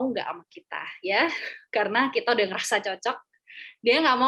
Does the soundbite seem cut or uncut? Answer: uncut